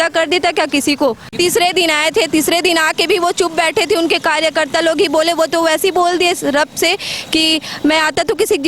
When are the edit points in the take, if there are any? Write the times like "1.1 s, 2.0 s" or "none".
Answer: 1.2 s